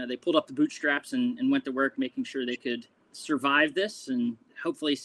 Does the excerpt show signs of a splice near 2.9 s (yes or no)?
no